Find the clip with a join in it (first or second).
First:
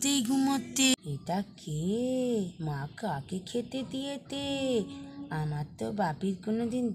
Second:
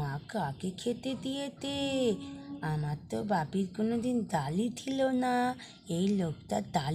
first